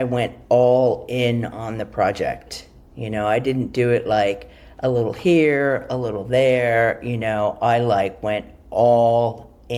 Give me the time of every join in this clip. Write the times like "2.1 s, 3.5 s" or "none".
none